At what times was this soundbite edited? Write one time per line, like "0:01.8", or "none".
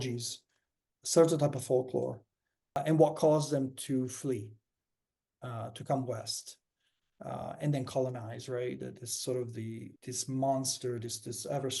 0:02.8
0:09.9